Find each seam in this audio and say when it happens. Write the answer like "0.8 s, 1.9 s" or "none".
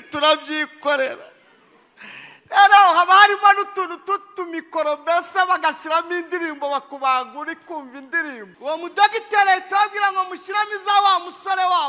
8.5 s

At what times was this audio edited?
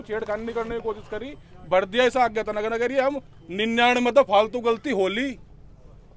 3.4 s

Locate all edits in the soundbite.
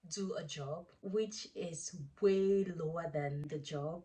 0.9 s

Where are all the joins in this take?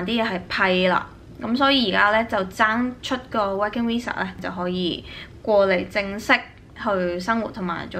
4.4 s

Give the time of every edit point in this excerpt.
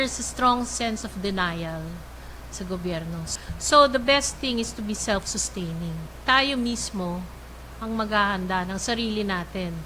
3.3 s

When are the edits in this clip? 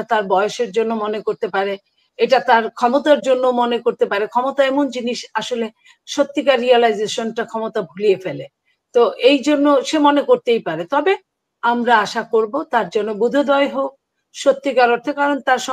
none

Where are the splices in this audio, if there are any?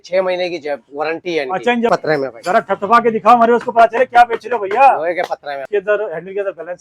1.9 s, 5.6 s

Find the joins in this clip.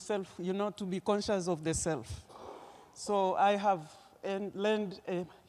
3.8 s

